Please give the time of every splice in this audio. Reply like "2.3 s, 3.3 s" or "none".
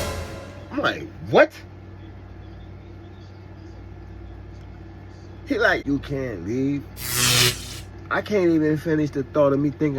5.8 s

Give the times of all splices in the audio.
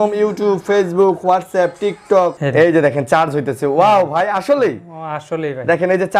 2.4 s

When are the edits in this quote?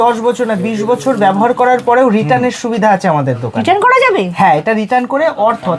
none

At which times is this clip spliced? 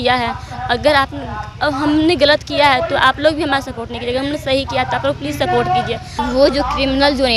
6.2 s

